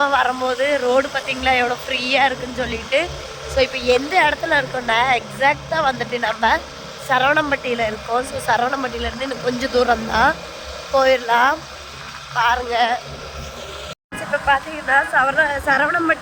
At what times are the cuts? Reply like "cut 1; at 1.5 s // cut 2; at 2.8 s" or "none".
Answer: cut 1; at 14.3 s